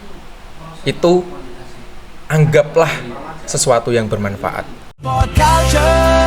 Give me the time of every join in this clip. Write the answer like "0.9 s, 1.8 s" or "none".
5.3 s